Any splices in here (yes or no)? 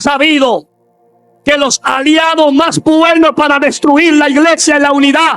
no